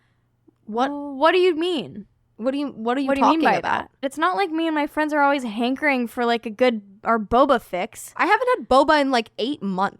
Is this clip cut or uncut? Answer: cut